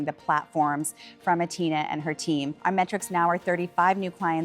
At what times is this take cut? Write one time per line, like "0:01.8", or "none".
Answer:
0:02.5